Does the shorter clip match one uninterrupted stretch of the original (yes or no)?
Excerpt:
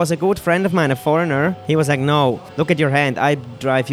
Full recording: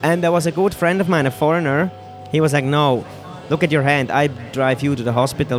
no